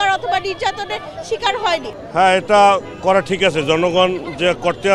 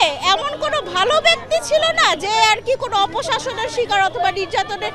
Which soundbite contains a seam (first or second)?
first